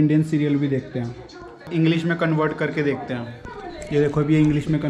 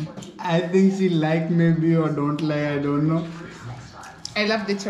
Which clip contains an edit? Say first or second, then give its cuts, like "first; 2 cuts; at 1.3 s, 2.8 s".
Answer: first; 1 cut; at 1.7 s